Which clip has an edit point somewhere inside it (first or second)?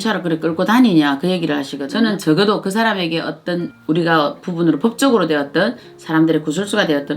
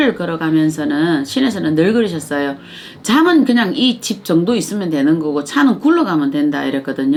first